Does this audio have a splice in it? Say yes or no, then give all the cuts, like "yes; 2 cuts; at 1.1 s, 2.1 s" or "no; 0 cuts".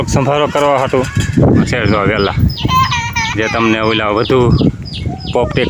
yes; 1 cut; at 1.7 s